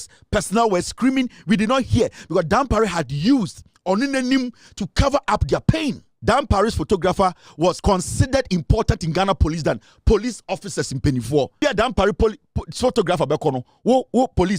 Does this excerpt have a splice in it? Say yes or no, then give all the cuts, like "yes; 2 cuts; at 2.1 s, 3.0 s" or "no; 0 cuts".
yes; 3 cuts; at 6.1 s, 7.8 s, 11.6 s